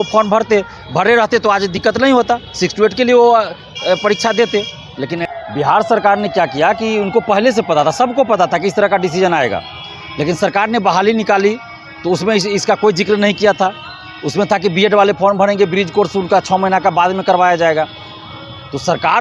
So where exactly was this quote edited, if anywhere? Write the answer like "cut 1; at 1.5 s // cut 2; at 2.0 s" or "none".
cut 1; at 5.2 s